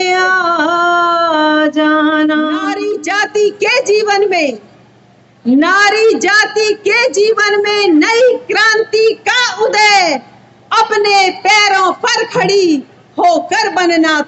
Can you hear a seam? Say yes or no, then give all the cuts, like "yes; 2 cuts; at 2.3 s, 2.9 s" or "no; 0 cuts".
yes; 1 cut; at 2.9 s